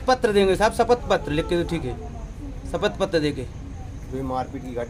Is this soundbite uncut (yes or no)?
yes